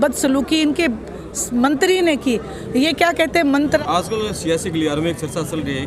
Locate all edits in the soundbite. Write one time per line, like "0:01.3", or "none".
0:03.8